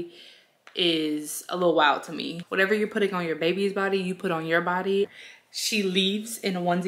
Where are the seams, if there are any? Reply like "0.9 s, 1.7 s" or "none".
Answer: 2.4 s, 5.1 s